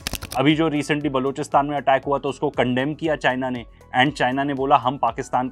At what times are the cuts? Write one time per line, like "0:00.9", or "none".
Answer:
none